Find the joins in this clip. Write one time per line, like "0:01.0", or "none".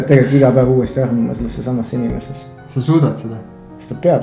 none